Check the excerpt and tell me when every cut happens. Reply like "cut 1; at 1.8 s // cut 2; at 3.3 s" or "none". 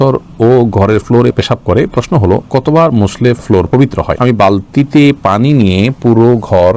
none